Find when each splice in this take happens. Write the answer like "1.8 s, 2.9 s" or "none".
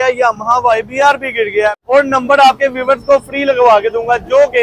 1.8 s

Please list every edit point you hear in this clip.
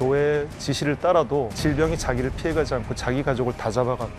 1.5 s

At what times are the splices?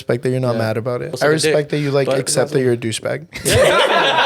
1.1 s

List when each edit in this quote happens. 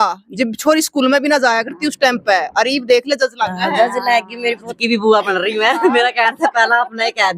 4.7 s

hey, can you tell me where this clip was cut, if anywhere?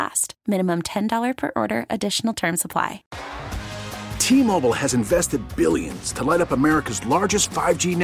3.1 s

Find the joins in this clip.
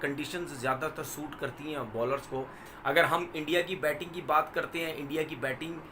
2.6 s

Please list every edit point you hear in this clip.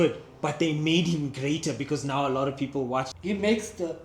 3.1 s

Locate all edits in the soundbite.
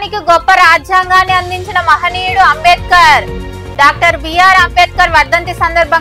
none

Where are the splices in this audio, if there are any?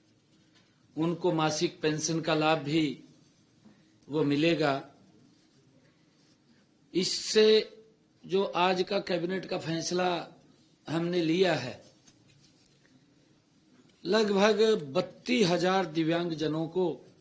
none

